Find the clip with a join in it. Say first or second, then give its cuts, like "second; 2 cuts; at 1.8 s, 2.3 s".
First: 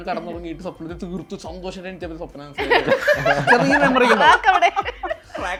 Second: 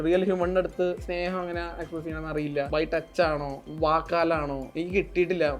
second; 3 cuts; at 2.7 s, 3.6 s, 4.6 s